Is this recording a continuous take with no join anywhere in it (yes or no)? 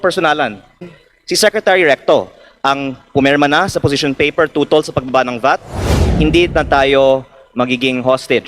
no